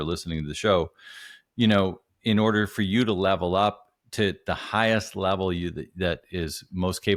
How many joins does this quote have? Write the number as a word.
zero